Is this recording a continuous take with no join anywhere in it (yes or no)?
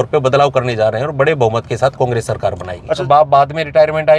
no